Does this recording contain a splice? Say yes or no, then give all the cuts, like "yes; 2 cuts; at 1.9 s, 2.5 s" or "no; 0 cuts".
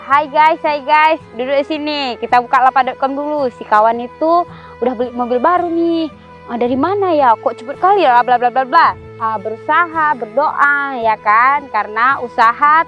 yes; 1 cut; at 9.2 s